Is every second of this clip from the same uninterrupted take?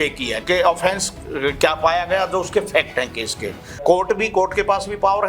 no; 1 cut; at 3.8 s

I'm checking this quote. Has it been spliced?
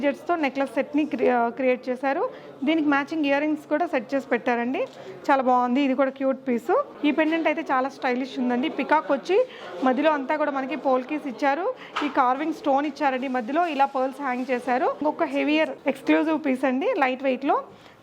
yes; 2 cuts; at 6.9 s, 15.0 s

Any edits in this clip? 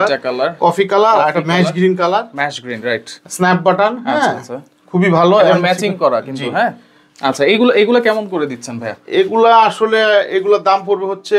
no; 0 cuts

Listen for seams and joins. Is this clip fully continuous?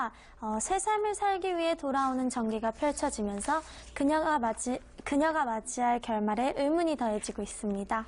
no; 1 cut; at 7.0 s

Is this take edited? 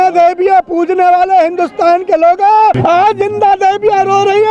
yes; 1 cut; at 2.8 s

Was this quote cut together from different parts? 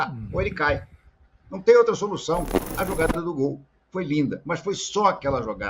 yes; 1 cut; at 2.6 s

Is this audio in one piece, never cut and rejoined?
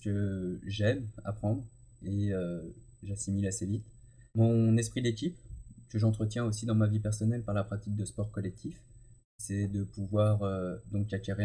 no; 2 cuts; at 4.4 s, 9.5 s

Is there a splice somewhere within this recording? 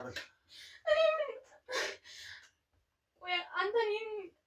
no; 0 cuts

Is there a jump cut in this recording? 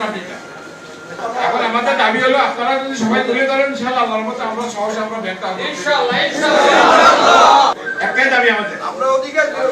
yes; 2 cuts; at 1.0 s, 7.8 s

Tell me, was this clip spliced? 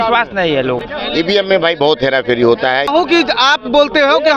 yes; 2 cuts; at 0.8 s, 2.9 s

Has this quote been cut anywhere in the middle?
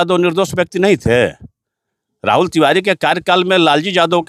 no; 0 cuts

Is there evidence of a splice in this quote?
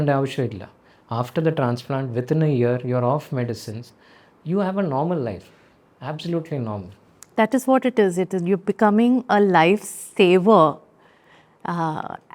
no; 0 cuts

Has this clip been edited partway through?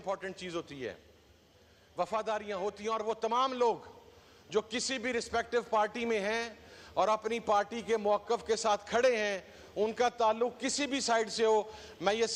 no; 0 cuts

